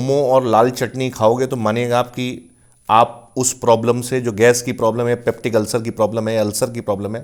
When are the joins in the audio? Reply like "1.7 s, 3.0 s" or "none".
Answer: none